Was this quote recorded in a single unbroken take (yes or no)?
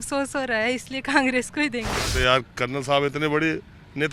no